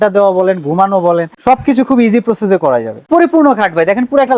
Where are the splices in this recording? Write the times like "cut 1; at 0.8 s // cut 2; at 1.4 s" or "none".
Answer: cut 1; at 1.3 s // cut 2; at 3.1 s